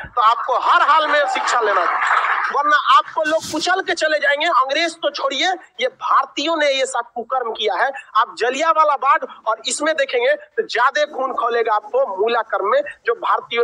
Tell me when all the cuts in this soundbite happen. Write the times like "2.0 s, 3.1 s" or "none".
none